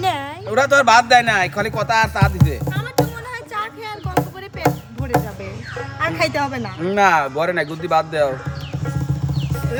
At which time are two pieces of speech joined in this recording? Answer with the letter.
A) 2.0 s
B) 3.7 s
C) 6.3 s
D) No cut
D